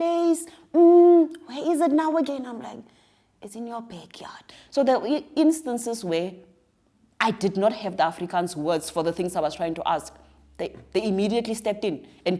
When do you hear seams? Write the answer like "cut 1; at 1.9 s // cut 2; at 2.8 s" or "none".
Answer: cut 1; at 4.5 s